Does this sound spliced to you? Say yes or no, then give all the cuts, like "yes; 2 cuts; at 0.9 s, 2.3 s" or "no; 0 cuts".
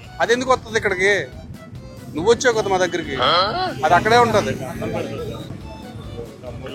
yes; 1 cut; at 1.5 s